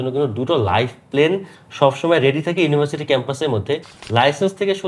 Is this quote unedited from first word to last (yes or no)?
no